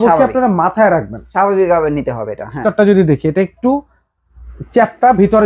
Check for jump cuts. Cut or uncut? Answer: cut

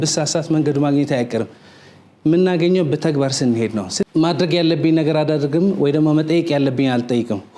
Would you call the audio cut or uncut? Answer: cut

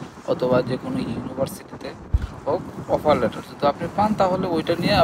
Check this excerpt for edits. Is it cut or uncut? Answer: uncut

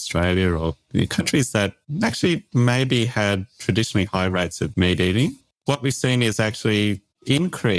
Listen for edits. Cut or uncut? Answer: uncut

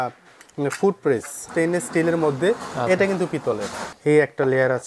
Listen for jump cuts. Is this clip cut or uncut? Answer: cut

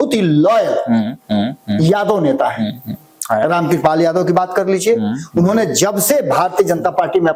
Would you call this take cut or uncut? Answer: uncut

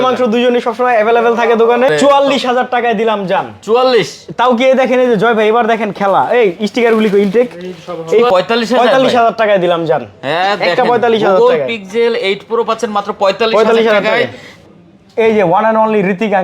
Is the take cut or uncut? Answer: cut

